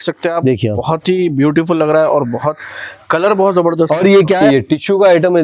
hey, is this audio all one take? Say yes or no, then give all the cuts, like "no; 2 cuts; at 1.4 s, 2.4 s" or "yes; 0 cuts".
no; 1 cut; at 4.3 s